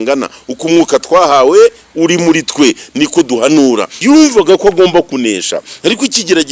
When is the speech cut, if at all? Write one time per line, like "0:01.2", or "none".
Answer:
0:03.9